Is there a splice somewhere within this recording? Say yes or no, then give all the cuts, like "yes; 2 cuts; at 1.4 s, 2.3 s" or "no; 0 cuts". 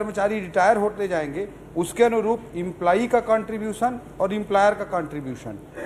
no; 0 cuts